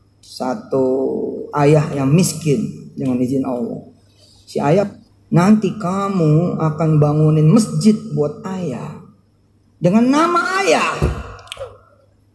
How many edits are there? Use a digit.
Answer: 1